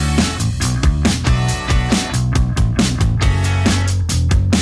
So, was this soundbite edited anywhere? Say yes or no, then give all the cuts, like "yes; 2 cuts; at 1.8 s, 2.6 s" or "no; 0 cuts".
yes; 1 cut; at 2.3 s